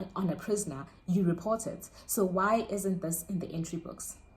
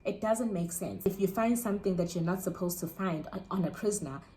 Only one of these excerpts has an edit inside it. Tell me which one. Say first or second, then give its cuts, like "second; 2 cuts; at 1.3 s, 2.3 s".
second; 1 cut; at 1.1 s